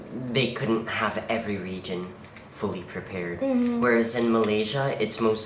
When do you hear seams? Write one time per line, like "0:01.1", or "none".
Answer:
none

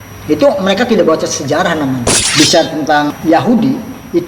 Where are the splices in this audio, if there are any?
0:02.2
0:03.1

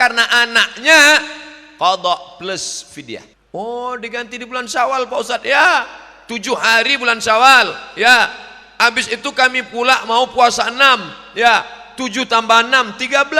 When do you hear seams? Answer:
0:03.3

